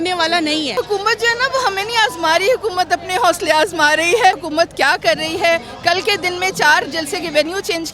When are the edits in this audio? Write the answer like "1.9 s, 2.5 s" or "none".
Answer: 0.8 s, 4.4 s